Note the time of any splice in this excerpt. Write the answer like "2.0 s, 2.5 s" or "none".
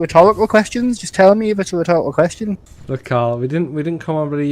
2.7 s